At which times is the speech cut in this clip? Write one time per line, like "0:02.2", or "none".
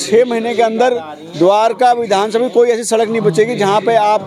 none